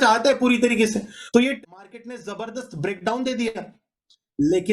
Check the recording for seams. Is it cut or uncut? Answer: cut